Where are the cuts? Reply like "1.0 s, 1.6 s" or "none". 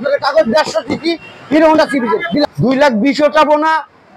2.4 s